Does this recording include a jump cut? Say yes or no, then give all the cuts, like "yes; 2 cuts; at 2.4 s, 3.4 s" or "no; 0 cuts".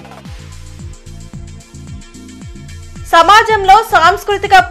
yes; 1 cut; at 1.2 s